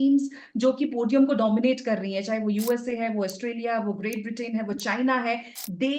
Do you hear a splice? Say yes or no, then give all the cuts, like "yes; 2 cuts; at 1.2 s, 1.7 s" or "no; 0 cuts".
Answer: no; 0 cuts